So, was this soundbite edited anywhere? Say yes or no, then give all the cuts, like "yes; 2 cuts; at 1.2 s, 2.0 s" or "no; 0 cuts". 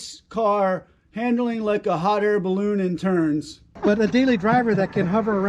no; 0 cuts